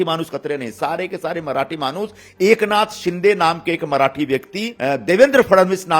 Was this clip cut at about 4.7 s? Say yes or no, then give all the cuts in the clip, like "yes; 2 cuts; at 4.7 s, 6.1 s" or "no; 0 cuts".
yes; 1 cut; at 4.7 s